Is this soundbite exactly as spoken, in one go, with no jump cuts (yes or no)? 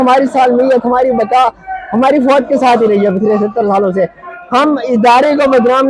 no